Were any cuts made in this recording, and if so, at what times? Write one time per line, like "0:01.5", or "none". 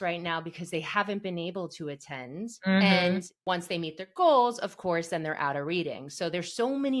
0:02.6
0:03.3